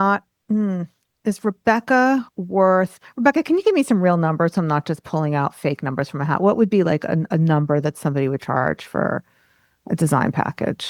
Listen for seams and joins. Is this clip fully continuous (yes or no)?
yes